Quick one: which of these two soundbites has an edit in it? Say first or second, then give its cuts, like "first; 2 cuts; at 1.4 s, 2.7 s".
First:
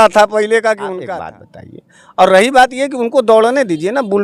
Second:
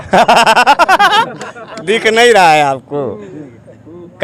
first; 1 cut; at 1.0 s